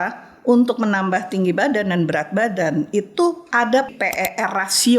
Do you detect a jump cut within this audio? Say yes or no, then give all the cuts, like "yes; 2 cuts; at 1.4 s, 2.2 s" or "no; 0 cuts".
yes; 1 cut; at 3.9 s